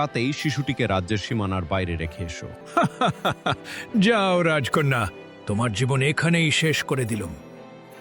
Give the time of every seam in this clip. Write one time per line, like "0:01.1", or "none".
0:02.5